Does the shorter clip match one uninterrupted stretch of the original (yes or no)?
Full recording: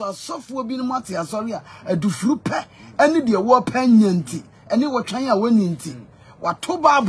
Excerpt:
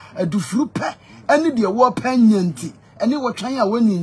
yes